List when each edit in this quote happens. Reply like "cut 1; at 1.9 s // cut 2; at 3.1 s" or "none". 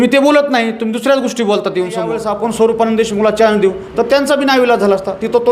cut 1; at 2.2 s